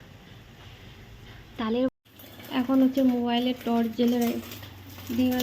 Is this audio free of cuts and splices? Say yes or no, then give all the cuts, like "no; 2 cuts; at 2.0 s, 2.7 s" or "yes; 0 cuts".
no; 1 cut; at 1.9 s